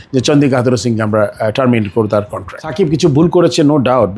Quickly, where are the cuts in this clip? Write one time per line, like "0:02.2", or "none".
0:02.7